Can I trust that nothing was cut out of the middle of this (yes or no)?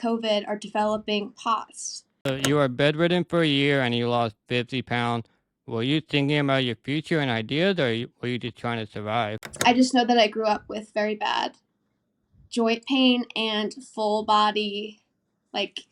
no